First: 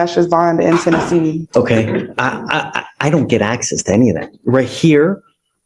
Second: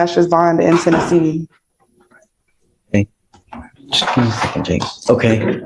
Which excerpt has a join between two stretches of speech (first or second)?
first